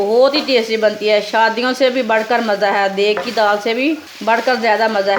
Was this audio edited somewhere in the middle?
yes; 1 cut; at 4.1 s

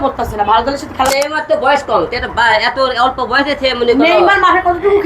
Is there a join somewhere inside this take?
yes; 1 cut; at 1.1 s

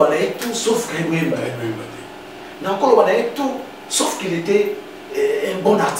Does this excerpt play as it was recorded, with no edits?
yes; 0 cuts

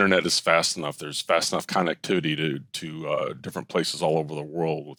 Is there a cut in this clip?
no; 0 cuts

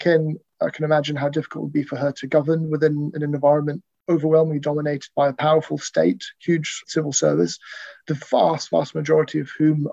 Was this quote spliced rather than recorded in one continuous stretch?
yes; 2 cuts; at 6.8 s, 7.9 s

